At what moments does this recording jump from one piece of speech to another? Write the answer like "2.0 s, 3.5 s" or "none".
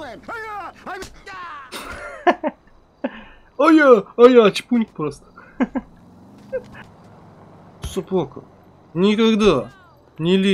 6.8 s